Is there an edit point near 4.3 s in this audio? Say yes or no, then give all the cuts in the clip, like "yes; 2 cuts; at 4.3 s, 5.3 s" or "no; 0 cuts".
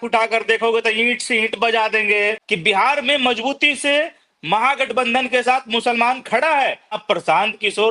no; 2 cuts; at 2.5 s, 7.0 s